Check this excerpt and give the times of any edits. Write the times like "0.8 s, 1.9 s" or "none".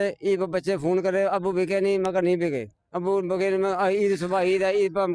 none